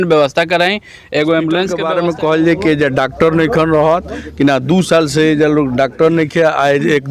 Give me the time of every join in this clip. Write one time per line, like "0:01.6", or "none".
0:01.8